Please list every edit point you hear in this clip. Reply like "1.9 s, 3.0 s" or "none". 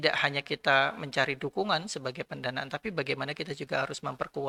none